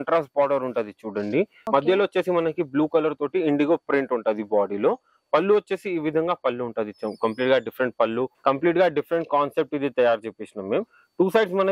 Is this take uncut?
no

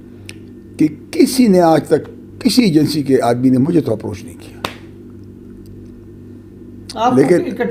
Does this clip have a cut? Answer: no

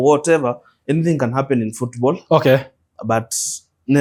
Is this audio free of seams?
yes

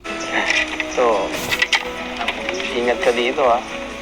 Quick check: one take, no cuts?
yes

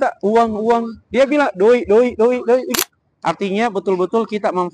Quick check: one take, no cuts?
no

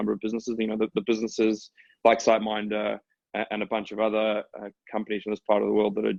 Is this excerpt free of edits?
yes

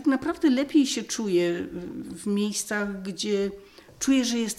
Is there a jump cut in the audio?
no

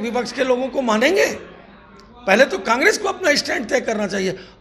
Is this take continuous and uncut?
yes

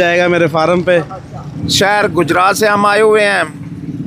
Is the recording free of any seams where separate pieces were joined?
no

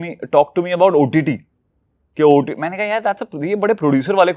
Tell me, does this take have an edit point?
no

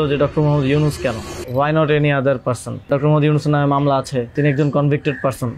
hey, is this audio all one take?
no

